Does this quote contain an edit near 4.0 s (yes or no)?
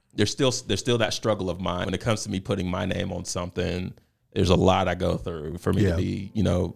no